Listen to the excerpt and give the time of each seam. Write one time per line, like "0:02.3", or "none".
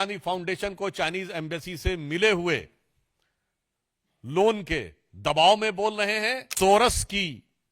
0:06.4